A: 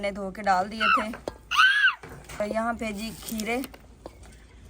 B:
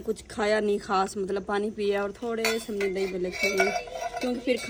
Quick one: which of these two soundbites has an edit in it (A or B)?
A